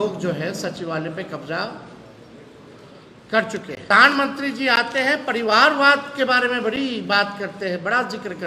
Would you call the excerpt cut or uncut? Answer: cut